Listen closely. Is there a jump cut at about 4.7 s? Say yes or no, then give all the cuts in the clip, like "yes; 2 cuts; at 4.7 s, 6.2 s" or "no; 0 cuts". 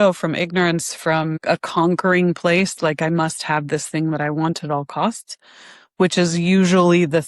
no; 1 cut; at 1.4 s